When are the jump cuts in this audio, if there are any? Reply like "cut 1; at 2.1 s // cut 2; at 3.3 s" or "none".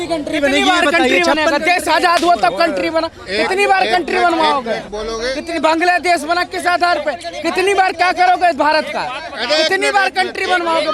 none